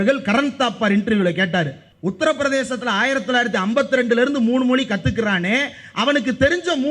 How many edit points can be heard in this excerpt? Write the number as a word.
one